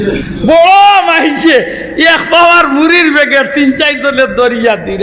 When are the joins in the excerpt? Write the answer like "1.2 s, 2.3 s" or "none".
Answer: none